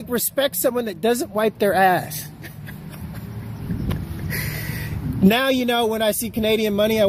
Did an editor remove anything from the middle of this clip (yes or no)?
no